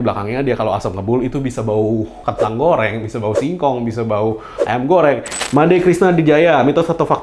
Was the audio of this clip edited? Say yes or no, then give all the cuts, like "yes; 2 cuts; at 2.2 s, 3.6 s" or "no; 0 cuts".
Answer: yes; 1 cut; at 5.3 s